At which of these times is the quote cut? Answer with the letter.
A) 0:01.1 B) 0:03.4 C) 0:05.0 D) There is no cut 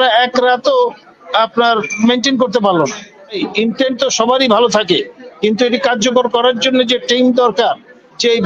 B